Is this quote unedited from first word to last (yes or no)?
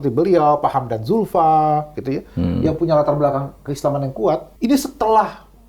no